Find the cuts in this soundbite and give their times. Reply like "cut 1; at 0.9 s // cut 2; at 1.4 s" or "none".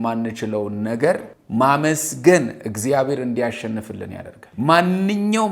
none